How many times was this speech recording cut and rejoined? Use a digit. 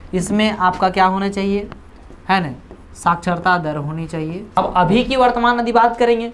1